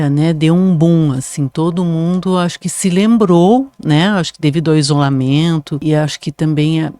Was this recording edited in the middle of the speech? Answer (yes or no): yes